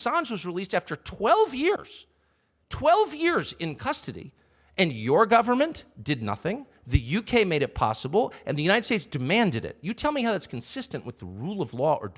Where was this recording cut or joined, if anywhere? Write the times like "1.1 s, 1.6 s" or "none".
none